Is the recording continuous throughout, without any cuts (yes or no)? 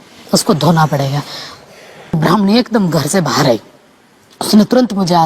no